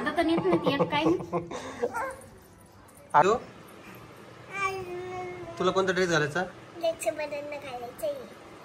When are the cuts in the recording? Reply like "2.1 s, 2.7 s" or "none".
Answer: 3.2 s